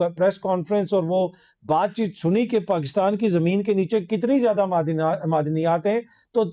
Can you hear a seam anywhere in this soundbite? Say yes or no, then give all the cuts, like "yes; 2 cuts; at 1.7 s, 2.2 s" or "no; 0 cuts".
no; 0 cuts